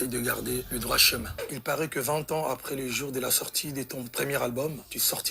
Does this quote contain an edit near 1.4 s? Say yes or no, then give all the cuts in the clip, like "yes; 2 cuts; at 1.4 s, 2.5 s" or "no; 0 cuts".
yes; 1 cut; at 1.4 s